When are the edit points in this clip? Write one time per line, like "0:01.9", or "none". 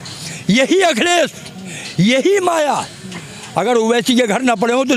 none